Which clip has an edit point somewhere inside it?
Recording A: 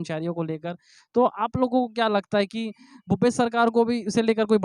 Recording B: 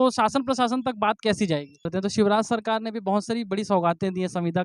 B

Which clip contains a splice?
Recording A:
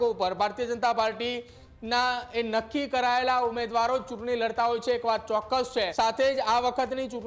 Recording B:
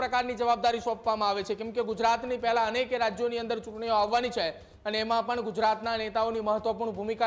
A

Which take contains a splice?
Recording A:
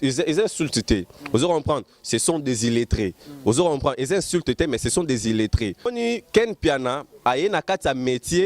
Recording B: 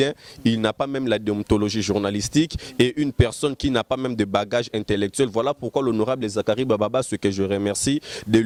A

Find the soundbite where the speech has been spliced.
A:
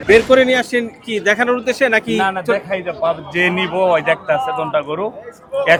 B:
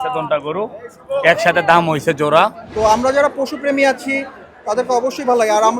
B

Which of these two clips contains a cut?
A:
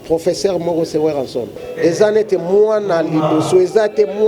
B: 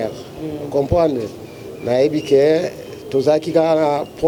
A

